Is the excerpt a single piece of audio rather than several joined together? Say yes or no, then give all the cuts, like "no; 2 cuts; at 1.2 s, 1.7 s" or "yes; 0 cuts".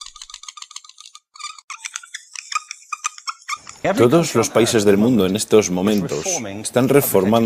yes; 0 cuts